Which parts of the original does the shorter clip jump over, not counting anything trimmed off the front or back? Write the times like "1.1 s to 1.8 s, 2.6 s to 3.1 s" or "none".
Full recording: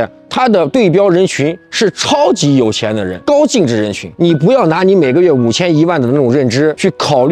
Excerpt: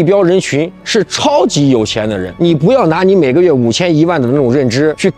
3.1 s to 4.0 s